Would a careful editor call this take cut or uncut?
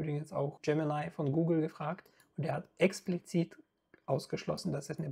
uncut